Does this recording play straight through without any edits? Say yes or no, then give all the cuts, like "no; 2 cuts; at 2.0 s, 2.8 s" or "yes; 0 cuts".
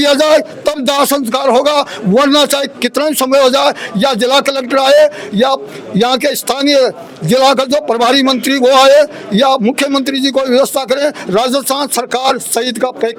yes; 0 cuts